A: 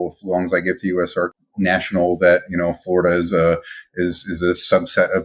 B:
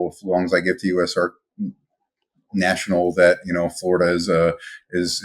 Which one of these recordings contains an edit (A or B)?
A